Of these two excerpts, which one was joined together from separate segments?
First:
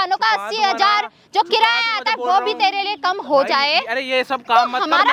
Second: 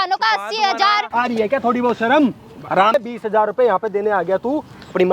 second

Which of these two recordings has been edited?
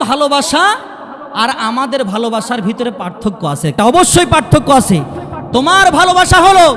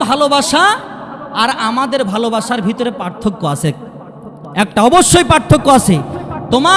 first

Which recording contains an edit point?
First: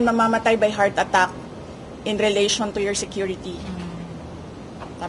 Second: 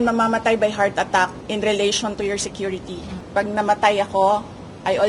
second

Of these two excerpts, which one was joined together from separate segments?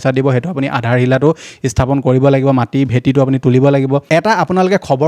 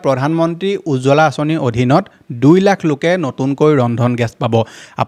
first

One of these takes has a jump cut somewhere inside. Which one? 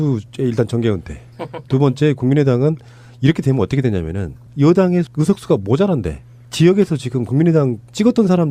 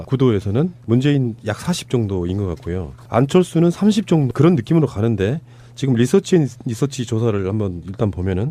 first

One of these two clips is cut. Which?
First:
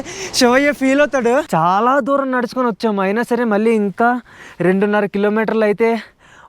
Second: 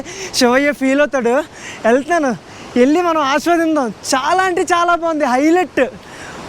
first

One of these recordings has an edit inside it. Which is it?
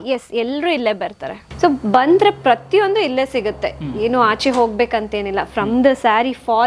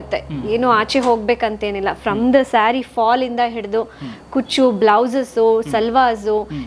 first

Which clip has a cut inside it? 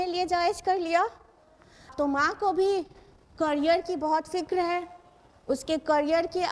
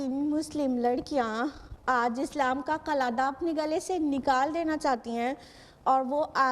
first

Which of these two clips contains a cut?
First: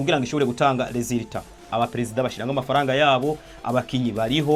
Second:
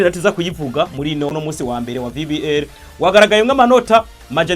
second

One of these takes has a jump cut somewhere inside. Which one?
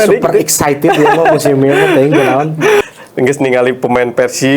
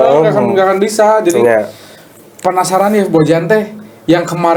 first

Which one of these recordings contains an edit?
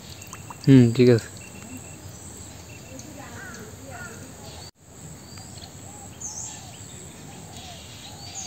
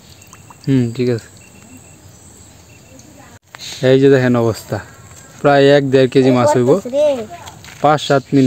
second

